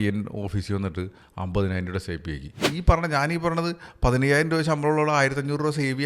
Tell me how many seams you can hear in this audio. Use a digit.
1